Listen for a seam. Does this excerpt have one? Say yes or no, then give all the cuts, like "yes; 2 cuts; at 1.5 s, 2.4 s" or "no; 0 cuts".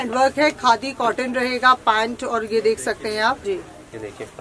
yes; 1 cut; at 3.4 s